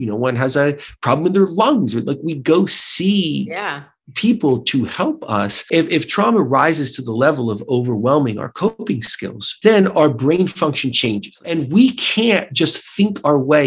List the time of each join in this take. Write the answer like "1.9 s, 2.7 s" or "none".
5.6 s, 9.4 s, 11.5 s